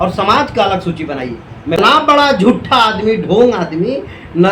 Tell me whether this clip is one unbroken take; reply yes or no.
no